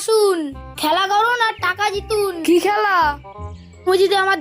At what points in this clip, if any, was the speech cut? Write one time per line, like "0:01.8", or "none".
0:02.4